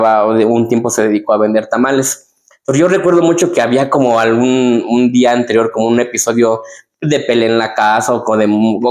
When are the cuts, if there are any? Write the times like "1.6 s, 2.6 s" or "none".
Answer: none